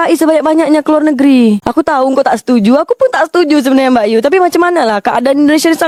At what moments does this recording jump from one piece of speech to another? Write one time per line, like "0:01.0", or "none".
none